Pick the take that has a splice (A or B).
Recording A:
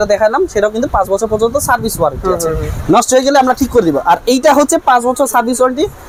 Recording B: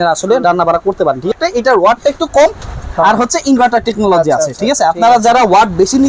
B